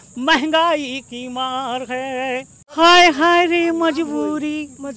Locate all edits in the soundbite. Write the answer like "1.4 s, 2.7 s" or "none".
2.6 s